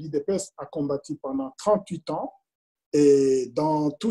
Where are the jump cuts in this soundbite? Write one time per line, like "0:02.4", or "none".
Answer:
none

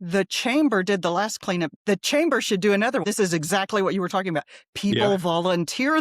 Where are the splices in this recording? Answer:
0:01.7
0:03.0

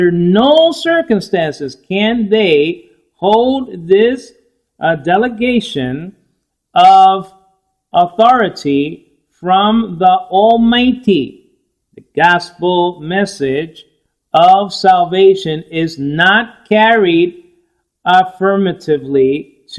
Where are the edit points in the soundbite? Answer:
0:05.2

